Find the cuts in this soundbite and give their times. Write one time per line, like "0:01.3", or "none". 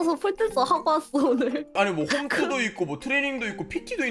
none